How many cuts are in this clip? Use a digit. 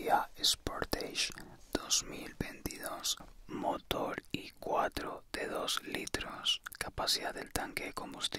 2